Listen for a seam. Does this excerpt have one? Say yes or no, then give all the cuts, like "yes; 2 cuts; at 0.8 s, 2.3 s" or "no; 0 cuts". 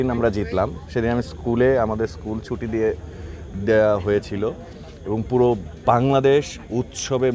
no; 0 cuts